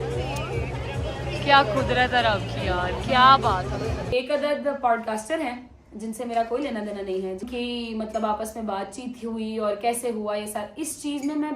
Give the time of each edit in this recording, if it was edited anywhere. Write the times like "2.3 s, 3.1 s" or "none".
4.1 s, 7.5 s